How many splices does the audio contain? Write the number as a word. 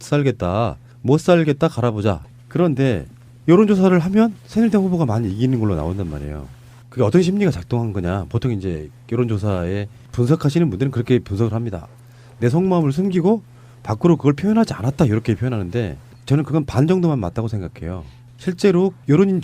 one